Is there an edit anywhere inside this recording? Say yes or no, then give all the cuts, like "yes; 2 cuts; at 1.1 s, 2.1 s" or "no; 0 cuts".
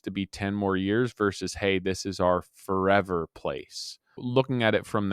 yes; 1 cut; at 4.2 s